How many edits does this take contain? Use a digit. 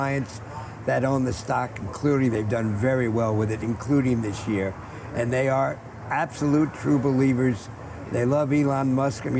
0